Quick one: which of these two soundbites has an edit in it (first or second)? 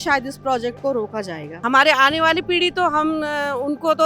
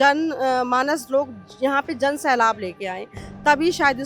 first